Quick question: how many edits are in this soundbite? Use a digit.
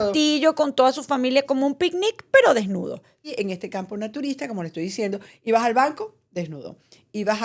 1